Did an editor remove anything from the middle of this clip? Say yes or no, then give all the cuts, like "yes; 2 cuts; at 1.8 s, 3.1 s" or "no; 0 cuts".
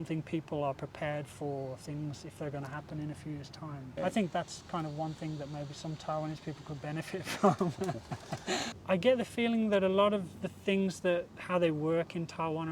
yes; 2 cuts; at 4.0 s, 8.7 s